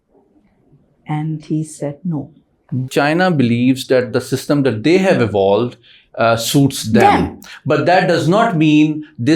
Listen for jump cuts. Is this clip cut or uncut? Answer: cut